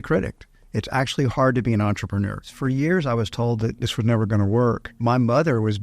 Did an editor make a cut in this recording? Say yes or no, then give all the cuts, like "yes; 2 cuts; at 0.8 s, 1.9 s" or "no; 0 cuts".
yes; 3 cuts; at 2.5 s, 3.8 s, 4.9 s